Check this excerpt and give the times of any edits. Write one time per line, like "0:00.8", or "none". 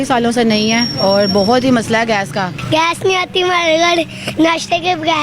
0:00.9
0:02.6